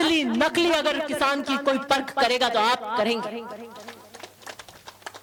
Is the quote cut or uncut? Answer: uncut